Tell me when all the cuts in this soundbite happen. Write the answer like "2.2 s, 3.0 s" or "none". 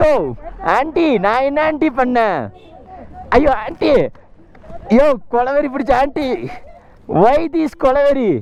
none